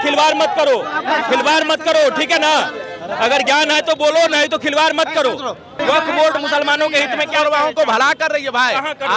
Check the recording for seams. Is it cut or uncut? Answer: cut